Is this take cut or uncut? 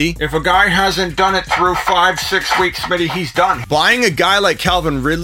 cut